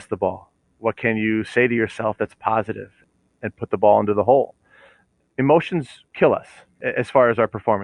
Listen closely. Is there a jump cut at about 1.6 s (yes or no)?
no